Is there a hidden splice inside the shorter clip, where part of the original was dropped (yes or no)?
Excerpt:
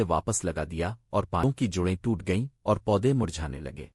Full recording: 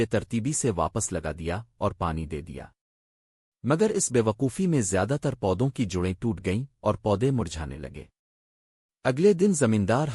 yes